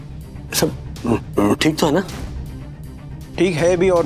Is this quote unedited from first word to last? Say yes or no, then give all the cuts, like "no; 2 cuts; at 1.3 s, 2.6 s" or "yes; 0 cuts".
yes; 0 cuts